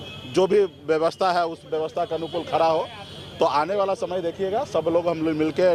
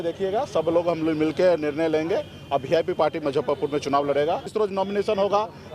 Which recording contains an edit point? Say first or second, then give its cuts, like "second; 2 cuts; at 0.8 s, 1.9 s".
second; 1 cut; at 4.5 s